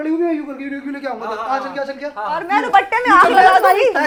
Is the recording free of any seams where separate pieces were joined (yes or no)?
yes